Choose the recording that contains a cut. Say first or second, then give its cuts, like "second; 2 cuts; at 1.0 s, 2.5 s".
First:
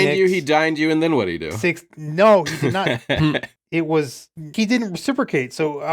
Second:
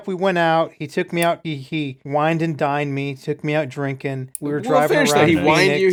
first; 3 cuts; at 1.5 s, 2.9 s, 4.5 s